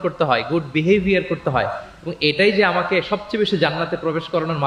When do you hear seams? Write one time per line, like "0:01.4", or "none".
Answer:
none